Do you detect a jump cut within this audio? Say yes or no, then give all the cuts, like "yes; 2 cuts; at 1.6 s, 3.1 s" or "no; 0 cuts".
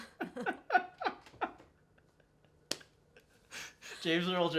no; 0 cuts